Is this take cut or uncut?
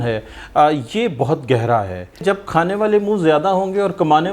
cut